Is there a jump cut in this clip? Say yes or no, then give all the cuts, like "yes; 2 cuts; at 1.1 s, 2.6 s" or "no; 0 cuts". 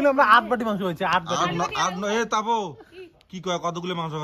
no; 0 cuts